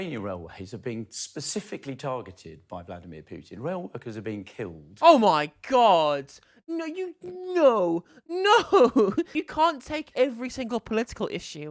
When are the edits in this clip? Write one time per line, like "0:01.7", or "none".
0:09.4